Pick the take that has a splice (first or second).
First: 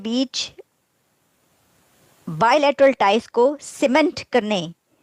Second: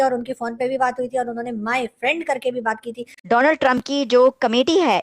second